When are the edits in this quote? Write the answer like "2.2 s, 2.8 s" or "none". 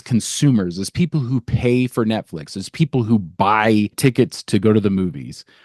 4.0 s